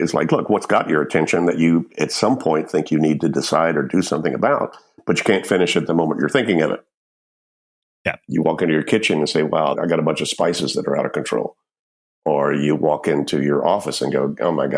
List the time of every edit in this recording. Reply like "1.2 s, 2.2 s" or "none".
1.6 s, 9.8 s